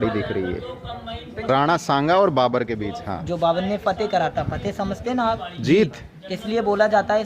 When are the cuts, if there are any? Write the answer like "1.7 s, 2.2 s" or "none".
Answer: none